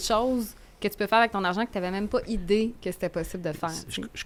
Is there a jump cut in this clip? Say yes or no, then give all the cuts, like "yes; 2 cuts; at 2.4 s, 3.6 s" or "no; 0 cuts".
no; 0 cuts